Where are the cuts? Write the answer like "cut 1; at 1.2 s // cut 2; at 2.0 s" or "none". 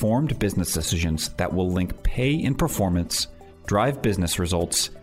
none

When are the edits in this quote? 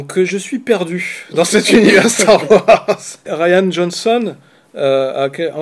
cut 1; at 3.3 s

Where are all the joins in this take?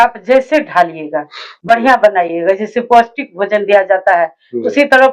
none

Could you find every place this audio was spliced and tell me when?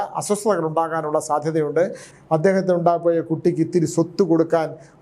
cut 1; at 2.0 s

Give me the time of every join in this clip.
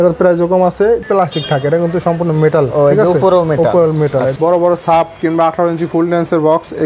cut 1; at 1.0 s // cut 2; at 4.3 s

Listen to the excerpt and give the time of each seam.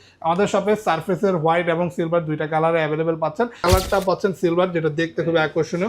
cut 1; at 3.6 s

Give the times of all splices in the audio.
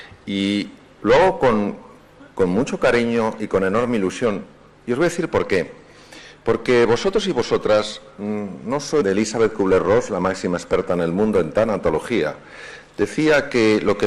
none

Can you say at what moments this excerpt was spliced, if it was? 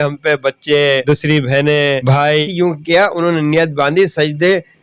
cut 1; at 2.4 s

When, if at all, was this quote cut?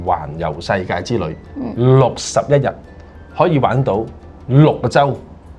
none

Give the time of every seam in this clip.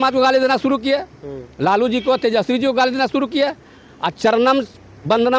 none

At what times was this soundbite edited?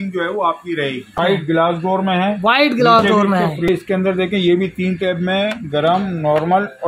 cut 1; at 1.2 s // cut 2; at 3.7 s

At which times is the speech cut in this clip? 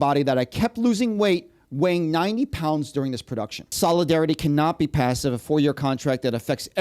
cut 1; at 3.7 s

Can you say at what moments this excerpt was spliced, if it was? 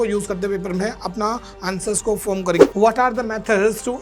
cut 1; at 2.6 s

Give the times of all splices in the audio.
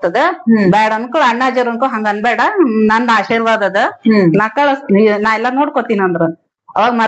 none

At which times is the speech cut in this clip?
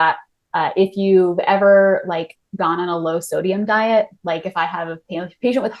none

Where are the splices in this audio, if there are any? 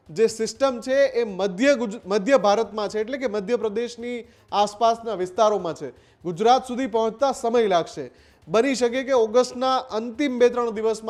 none

